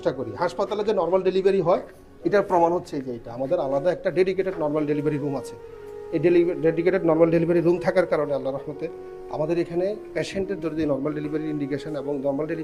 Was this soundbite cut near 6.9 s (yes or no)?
no